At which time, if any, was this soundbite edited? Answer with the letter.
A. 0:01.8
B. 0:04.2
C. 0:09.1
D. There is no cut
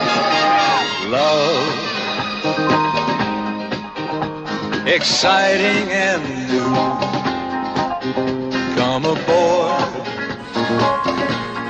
C